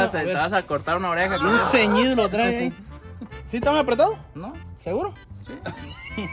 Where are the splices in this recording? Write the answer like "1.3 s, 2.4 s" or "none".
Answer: none

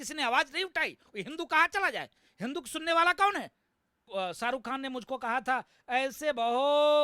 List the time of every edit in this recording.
4.1 s

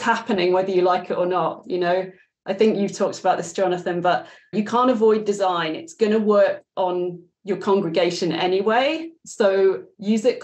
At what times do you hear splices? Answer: 4.5 s

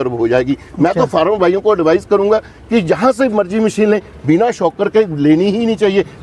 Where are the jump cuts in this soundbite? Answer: none

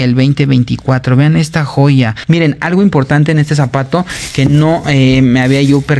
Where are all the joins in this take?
2.2 s

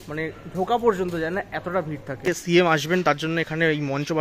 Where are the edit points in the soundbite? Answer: 2.3 s

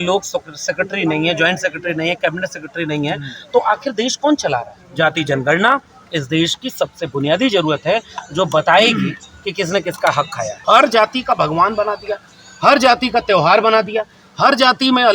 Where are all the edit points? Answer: 4.8 s, 10.6 s

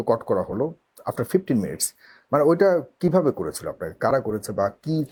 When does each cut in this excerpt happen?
none

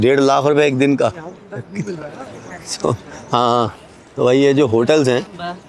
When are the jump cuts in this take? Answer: none

